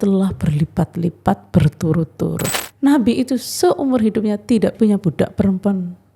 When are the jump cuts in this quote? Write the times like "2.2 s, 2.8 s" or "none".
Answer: 2.5 s